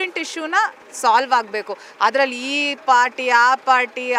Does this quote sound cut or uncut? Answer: uncut